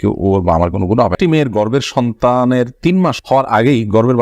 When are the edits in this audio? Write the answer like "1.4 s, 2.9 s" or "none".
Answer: 1.1 s